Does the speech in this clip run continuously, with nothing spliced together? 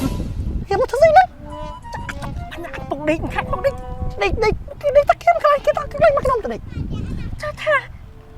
yes; 0 cuts

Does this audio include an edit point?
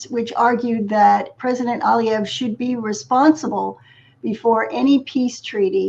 no; 0 cuts

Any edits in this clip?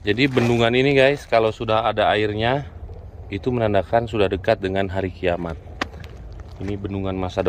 no; 0 cuts

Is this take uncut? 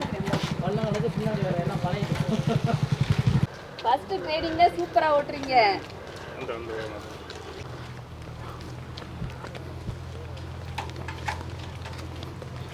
yes; 0 cuts

